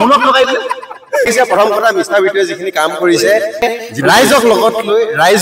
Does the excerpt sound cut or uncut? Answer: cut